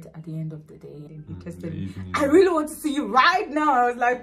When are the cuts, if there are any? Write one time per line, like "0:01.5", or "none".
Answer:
0:01.1